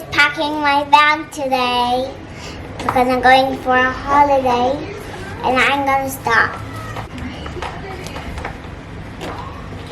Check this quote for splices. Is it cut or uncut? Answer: cut